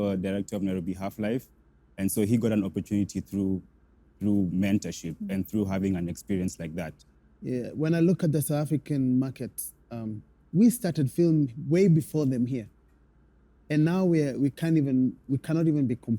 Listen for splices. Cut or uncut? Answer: cut